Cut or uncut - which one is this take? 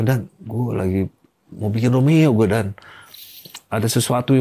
uncut